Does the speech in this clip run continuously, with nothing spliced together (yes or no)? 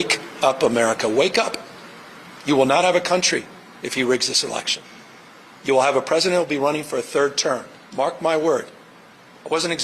yes